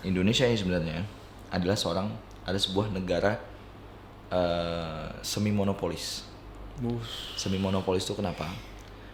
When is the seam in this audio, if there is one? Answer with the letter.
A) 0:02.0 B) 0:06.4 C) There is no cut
C